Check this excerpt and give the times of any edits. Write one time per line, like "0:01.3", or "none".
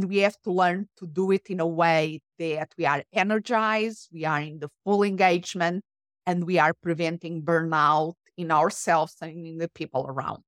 none